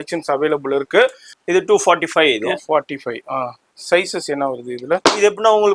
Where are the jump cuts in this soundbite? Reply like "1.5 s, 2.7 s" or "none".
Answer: 1.3 s